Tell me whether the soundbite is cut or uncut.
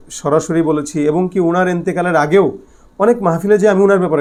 uncut